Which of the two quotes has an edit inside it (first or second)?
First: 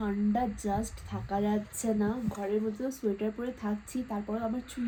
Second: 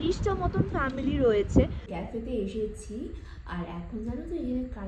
second